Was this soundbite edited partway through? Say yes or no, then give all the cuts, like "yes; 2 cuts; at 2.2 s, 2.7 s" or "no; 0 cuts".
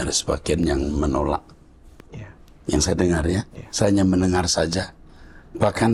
no; 0 cuts